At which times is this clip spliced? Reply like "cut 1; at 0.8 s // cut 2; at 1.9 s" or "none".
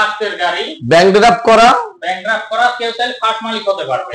none